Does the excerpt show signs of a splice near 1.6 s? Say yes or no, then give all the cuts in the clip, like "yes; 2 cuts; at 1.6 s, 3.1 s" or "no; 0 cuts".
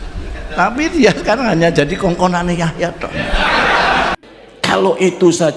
no; 1 cut; at 4.2 s